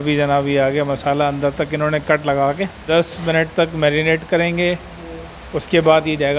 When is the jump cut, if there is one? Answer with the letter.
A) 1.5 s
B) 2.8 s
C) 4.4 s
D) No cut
B